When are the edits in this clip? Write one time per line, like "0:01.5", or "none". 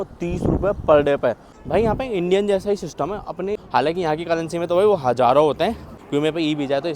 0:01.6
0:03.6
0:05.9